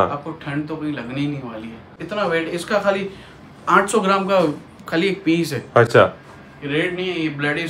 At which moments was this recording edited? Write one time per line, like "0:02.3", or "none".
0:01.9
0:05.9